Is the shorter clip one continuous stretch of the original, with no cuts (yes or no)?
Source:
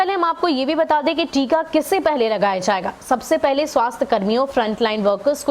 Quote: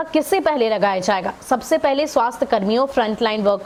yes